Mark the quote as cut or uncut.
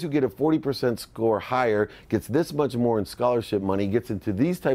uncut